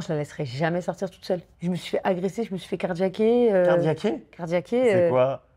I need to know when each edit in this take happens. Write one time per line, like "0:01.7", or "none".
0:01.5